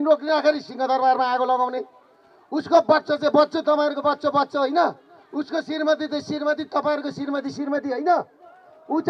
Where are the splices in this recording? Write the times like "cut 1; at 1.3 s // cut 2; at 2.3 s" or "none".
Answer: none